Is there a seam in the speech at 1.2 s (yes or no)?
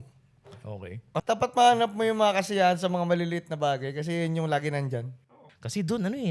yes